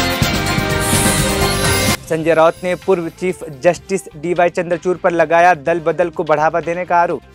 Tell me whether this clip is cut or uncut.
cut